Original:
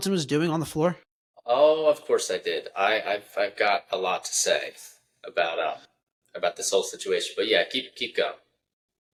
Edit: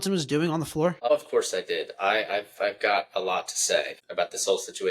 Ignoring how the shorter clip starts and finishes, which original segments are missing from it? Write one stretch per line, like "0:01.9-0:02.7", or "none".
0:01.0-0:01.8
0:04.8-0:06.2